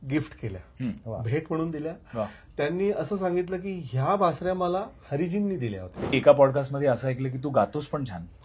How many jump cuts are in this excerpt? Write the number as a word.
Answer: one